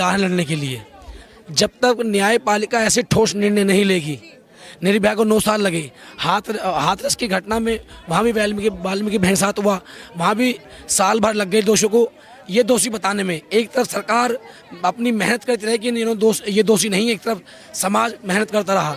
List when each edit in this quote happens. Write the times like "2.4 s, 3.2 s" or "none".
none